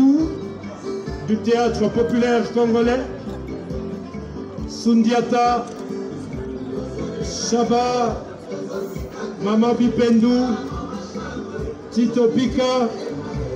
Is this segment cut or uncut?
uncut